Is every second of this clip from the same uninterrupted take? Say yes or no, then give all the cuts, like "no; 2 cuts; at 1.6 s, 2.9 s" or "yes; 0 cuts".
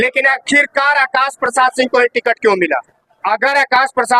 no; 1 cut; at 3.2 s